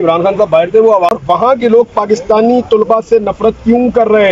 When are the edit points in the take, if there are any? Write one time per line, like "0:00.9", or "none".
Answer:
0:01.1